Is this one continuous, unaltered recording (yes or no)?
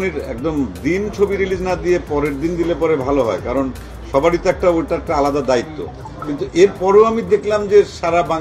yes